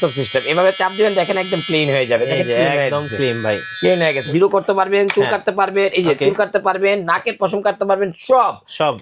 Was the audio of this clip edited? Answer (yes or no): yes